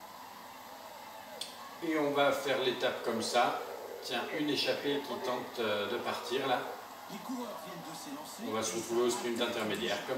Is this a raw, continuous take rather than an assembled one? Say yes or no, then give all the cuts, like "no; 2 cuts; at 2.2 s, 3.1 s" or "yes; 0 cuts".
no; 1 cut; at 8.0 s